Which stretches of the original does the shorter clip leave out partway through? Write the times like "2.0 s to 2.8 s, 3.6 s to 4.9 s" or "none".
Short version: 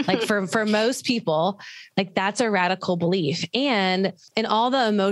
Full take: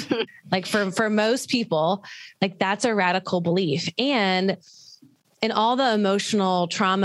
4.7 s to 5.3 s